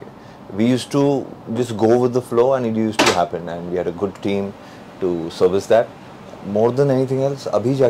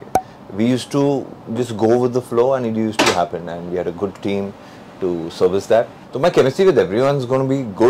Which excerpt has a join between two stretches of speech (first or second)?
second